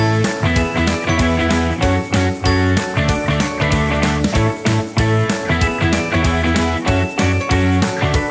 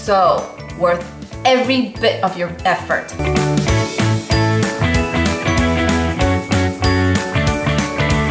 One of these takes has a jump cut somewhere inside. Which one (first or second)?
second